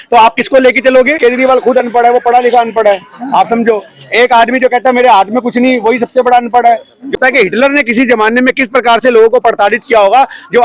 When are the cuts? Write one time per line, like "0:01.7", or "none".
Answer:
0:01.2
0:07.2